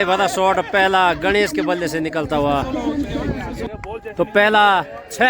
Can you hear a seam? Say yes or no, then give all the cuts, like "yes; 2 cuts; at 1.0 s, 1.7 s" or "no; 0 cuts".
yes; 1 cut; at 3.5 s